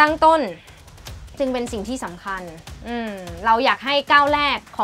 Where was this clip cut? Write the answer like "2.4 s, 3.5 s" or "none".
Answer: none

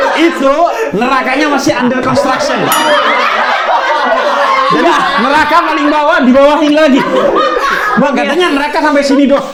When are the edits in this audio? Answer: none

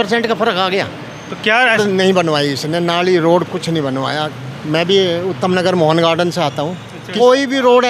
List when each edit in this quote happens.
1.8 s, 7.0 s

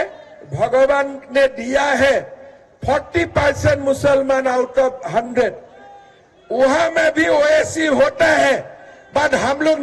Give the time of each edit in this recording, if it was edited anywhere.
none

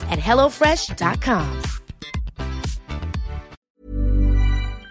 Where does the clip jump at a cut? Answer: 3.7 s

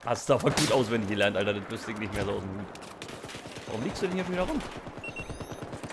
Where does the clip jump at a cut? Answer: 4.6 s

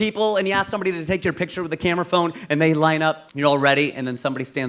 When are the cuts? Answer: 3.3 s

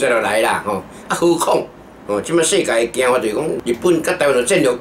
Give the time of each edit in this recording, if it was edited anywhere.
3.6 s

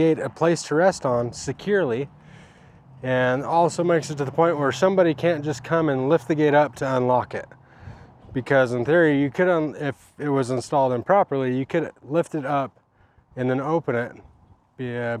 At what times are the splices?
none

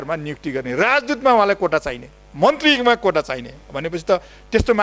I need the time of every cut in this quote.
none

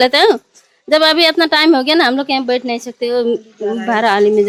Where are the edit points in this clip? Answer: none

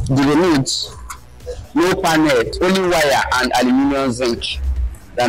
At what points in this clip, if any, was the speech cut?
2.5 s

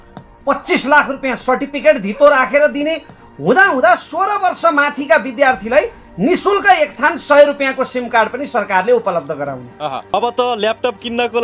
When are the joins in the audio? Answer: 10.0 s

